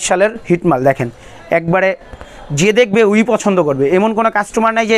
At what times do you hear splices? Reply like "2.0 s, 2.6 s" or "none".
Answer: none